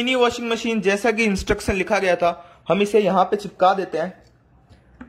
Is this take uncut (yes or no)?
yes